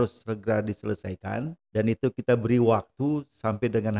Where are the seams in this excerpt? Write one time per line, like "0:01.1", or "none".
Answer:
0:01.6

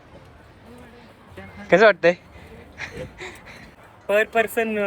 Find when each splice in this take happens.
0:03.7

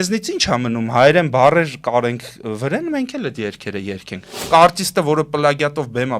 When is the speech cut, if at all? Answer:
0:04.4

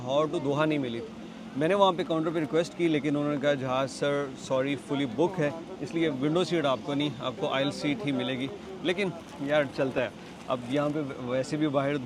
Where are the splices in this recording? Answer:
none

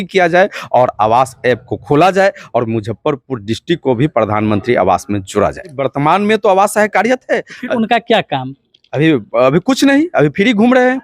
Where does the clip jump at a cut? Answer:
0:05.8

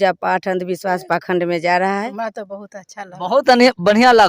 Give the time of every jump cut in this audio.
0:02.1

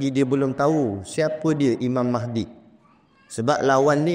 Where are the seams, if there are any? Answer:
none

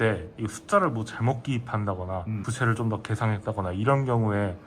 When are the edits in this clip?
0:02.4

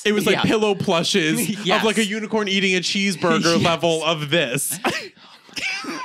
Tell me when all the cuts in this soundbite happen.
none

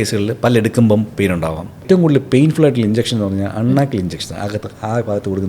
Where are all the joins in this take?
0:01.8

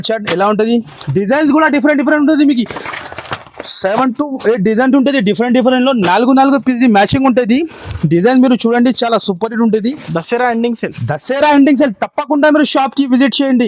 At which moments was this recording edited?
0:10.0

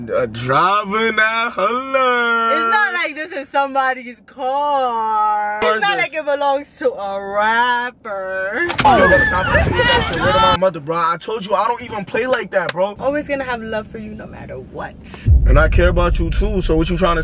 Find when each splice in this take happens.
0:05.6
0:13.0

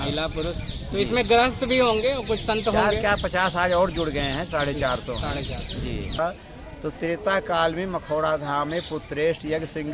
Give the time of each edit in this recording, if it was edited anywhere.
0:06.2

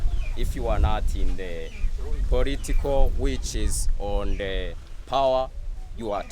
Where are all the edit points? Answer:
none

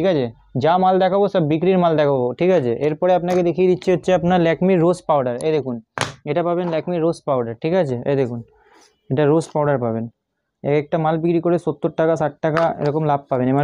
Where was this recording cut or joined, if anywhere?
none

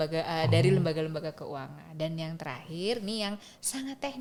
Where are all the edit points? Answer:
none

